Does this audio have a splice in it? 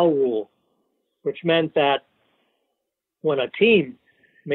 no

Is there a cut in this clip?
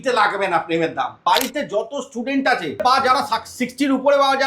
yes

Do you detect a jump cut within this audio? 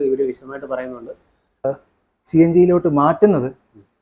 yes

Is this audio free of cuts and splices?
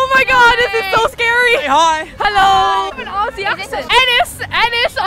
yes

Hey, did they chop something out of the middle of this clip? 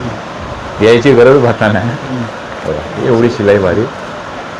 no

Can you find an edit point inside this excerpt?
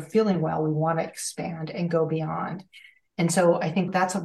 no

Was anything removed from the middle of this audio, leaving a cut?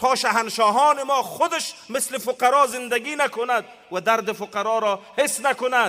no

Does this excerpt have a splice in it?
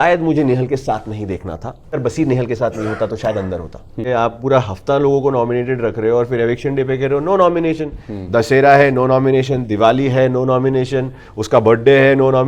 yes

